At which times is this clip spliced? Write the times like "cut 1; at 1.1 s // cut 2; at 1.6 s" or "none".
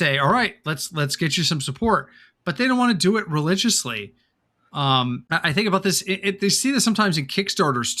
cut 1; at 5.2 s